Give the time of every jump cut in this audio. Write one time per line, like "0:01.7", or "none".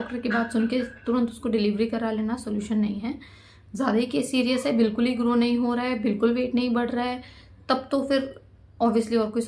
none